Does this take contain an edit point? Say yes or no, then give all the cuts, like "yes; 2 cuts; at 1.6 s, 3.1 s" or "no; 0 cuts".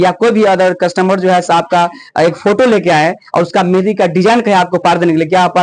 no; 0 cuts